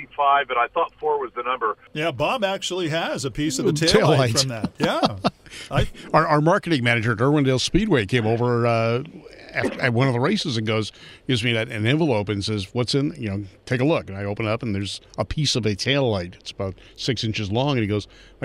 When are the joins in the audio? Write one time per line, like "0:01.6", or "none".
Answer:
0:01.9